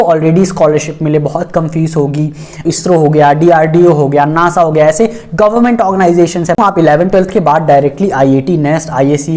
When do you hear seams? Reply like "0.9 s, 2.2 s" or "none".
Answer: 2.6 s, 6.6 s